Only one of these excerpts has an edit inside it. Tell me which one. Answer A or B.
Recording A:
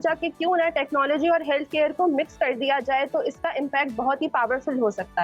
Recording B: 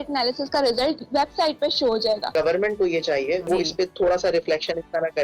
B